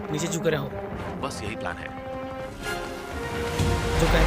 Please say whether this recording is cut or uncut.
cut